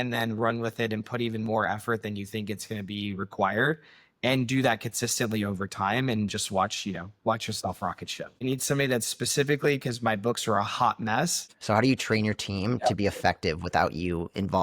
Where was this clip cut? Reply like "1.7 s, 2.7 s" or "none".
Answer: 8.4 s, 11.4 s

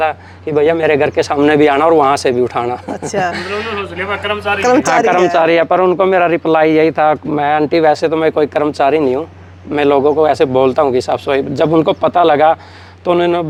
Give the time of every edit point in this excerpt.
none

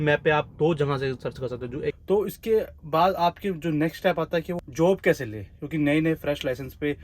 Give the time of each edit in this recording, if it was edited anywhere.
1.9 s, 4.6 s

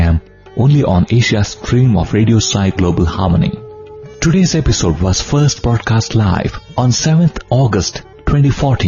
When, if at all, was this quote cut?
6.6 s

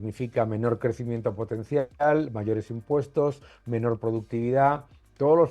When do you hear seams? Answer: none

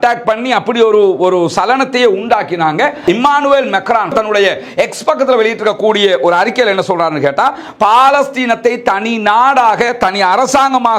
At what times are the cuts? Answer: 3.0 s, 4.1 s

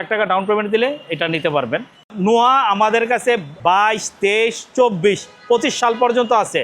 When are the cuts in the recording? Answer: 2.0 s, 3.5 s

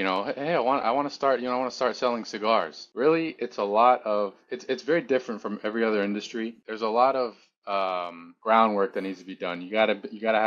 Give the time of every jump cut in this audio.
2.8 s, 6.6 s

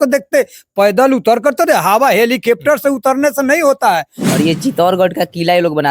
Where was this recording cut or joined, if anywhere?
4.2 s

